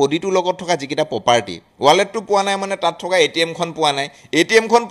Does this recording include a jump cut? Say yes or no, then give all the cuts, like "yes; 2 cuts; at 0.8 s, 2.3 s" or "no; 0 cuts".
yes; 1 cut; at 1.6 s